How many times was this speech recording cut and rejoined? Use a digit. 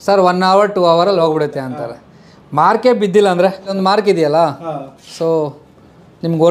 1